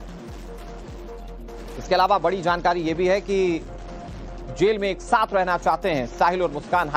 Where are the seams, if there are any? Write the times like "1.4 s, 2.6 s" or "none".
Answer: 1.7 s